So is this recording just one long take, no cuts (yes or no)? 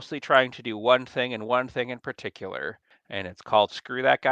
no